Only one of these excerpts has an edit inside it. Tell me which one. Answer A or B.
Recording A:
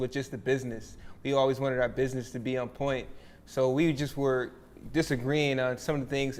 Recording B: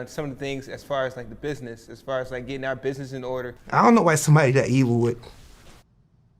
B